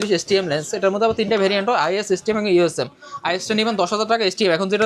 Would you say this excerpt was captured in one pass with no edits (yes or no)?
yes